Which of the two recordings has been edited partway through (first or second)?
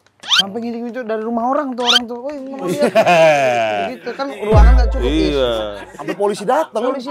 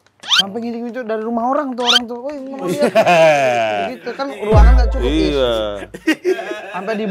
first